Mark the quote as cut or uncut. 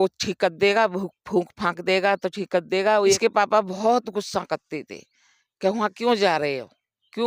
cut